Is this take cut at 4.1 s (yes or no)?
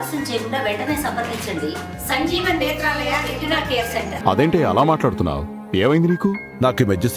yes